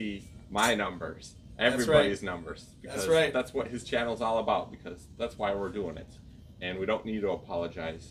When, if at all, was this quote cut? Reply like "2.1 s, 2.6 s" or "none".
none